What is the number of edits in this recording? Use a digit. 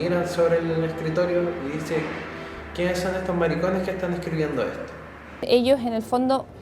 1